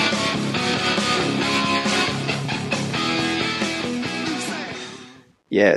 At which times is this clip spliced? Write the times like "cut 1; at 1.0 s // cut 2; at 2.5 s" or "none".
none

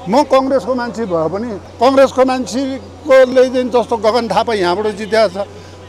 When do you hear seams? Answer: none

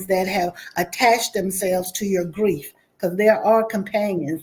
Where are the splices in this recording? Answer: none

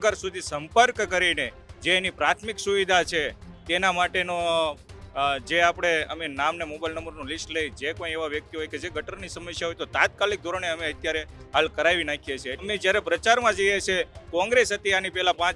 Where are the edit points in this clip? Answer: cut 1; at 12.6 s

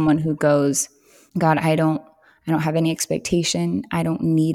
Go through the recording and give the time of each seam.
none

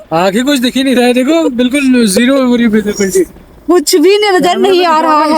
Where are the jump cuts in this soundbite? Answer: none

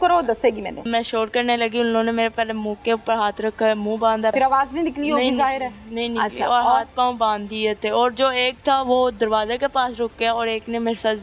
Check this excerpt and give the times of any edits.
cut 1; at 0.8 s // cut 2; at 4.3 s

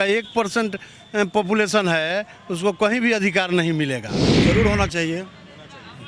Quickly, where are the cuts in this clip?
cut 1; at 4.2 s

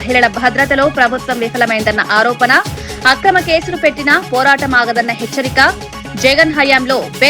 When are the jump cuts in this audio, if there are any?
none

